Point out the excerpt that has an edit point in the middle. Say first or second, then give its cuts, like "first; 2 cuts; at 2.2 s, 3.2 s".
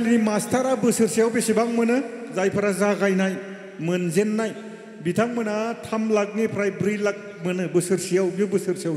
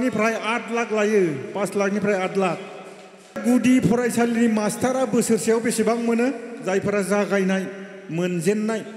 second; 1 cut; at 3.4 s